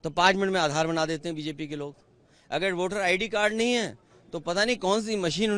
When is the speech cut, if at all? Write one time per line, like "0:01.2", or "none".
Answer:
none